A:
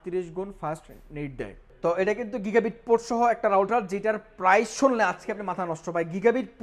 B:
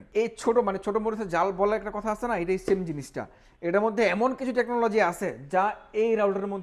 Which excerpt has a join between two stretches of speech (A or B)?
A